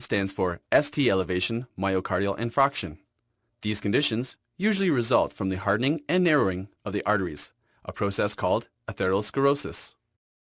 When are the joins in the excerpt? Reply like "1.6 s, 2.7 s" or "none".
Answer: 7.8 s